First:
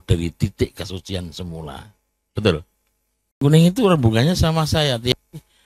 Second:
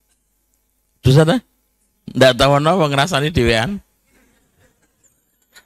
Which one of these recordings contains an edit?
first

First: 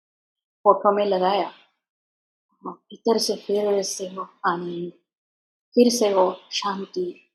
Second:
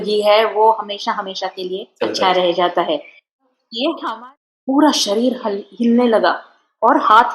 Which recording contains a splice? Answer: second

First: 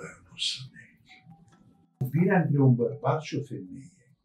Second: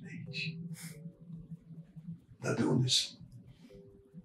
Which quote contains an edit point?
first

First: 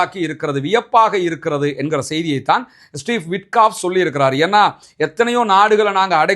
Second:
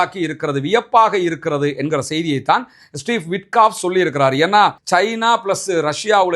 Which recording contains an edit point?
second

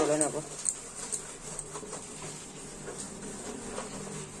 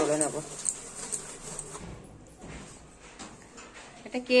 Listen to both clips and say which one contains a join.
second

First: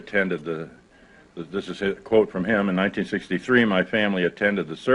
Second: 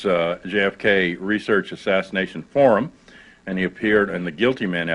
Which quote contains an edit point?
first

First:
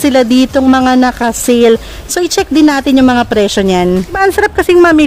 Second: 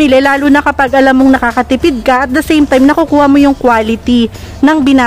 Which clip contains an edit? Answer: first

